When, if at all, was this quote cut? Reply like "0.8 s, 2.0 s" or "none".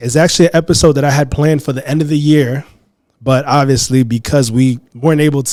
none